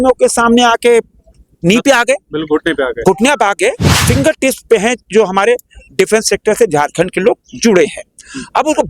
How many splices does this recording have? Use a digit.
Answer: 1